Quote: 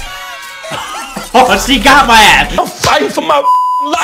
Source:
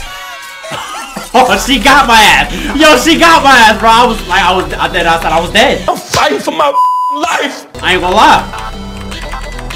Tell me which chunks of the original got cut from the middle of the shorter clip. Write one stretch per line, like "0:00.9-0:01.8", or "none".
0:02.5-0:05.8